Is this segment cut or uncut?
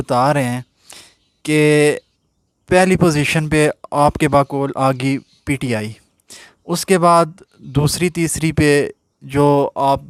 uncut